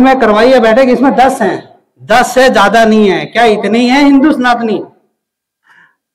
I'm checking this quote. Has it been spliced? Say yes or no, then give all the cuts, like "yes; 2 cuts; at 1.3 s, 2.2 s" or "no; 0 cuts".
no; 0 cuts